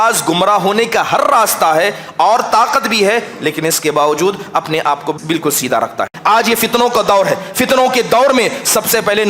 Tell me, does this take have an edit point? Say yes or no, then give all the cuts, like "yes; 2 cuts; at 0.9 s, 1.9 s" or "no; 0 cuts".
yes; 2 cuts; at 5.2 s, 6.1 s